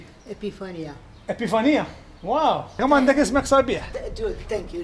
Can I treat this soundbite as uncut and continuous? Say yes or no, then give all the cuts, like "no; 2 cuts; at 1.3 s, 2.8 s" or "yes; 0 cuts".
yes; 0 cuts